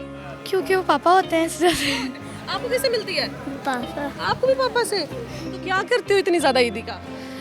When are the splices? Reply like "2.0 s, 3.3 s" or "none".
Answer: none